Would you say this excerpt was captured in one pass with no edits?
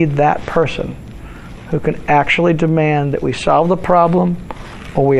yes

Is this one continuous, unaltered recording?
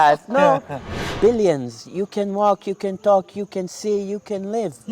no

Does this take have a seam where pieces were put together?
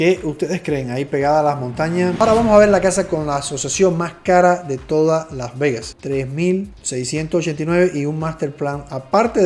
yes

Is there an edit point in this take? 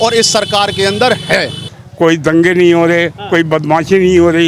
yes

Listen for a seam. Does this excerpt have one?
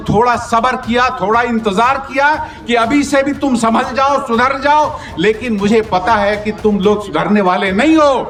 no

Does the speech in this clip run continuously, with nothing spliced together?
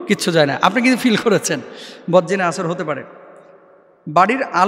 yes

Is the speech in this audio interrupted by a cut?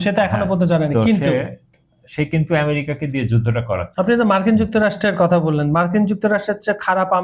yes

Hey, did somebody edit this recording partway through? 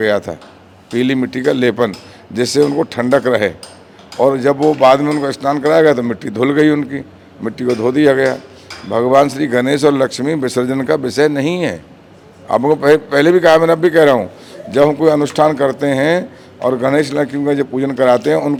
no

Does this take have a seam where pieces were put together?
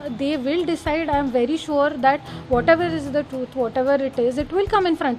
no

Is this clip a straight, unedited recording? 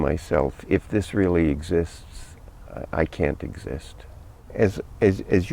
no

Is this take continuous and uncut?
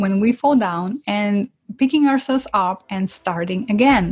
yes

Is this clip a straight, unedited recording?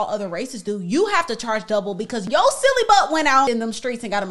no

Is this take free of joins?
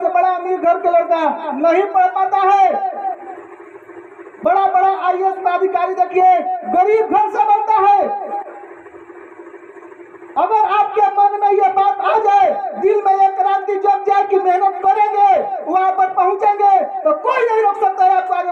yes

